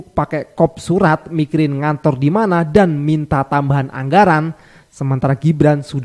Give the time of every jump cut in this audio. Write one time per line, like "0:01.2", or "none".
none